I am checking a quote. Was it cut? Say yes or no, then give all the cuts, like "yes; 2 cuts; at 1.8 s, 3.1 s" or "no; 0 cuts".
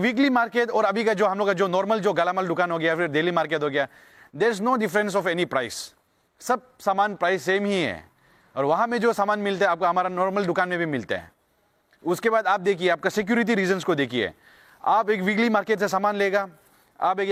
no; 0 cuts